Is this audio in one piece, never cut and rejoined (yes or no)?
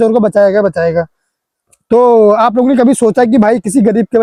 yes